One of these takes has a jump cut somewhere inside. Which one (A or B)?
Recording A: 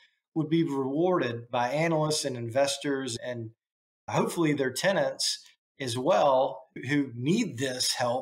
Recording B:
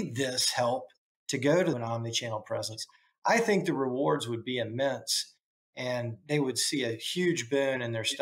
B